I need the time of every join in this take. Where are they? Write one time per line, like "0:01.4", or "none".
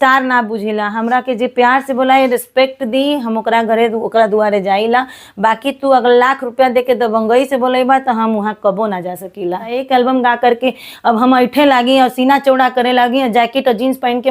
0:09.8